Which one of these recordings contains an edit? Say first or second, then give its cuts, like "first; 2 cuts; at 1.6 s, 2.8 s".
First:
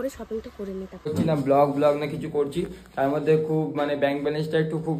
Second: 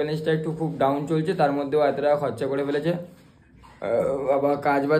first; 1 cut; at 1.1 s